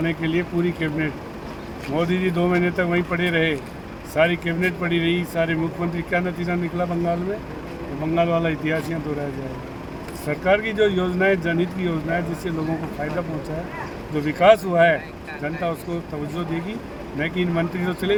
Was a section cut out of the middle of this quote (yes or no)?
no